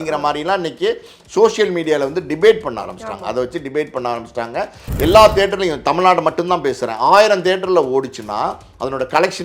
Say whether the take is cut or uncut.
cut